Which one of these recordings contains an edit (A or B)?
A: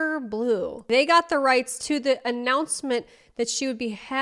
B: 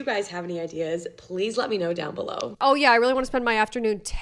B